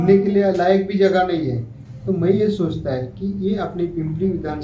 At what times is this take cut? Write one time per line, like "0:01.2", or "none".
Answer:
none